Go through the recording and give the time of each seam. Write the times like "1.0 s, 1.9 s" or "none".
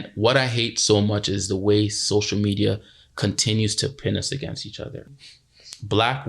5.1 s